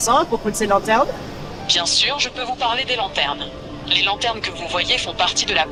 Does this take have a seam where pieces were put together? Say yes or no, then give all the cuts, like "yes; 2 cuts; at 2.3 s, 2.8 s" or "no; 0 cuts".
no; 0 cuts